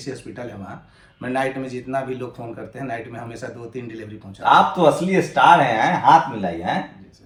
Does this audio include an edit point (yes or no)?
no